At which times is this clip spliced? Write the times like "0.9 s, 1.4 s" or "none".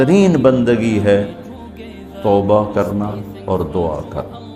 none